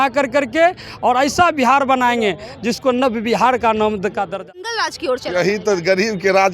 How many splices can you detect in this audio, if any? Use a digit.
1